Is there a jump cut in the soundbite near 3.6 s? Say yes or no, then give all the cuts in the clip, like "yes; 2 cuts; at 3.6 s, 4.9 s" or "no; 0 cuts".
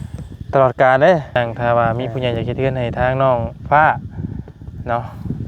no; 1 cut; at 1.4 s